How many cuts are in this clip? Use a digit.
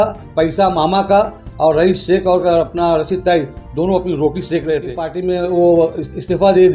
1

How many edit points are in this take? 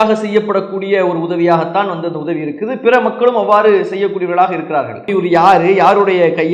1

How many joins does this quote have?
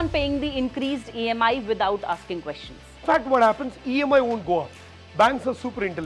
1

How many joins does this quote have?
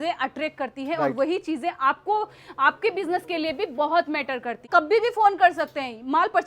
1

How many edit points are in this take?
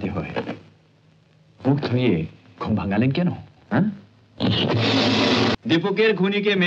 1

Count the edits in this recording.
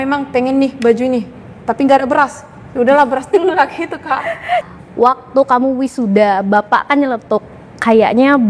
1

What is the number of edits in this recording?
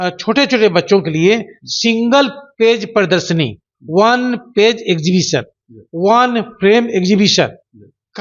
0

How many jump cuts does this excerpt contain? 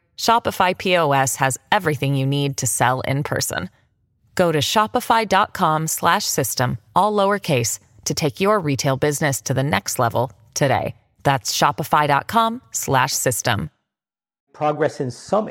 1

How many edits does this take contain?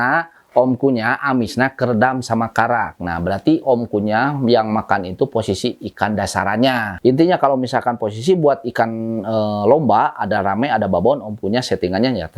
2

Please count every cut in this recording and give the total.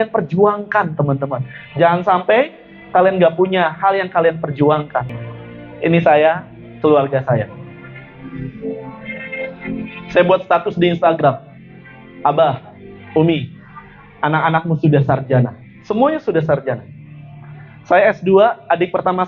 0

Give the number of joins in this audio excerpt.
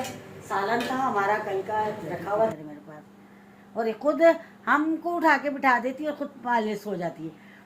1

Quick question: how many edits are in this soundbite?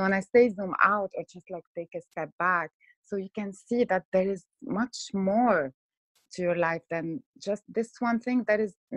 0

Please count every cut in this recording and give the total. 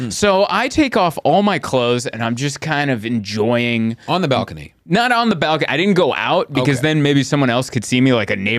0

